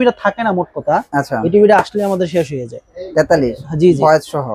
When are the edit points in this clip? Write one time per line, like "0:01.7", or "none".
none